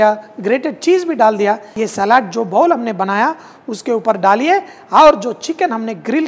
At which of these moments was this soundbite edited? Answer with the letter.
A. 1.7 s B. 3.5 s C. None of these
A